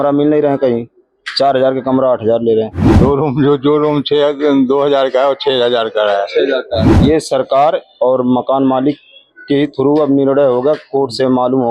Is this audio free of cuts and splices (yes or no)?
no